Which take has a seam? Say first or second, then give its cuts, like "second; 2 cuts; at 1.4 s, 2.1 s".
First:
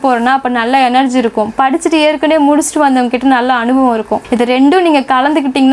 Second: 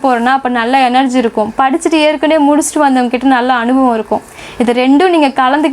first; 1 cut; at 4.2 s